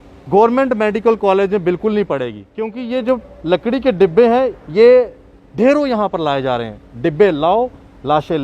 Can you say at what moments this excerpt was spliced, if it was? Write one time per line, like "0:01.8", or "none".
0:02.8